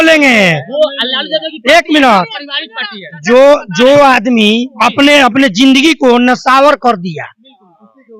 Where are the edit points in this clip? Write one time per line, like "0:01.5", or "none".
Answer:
none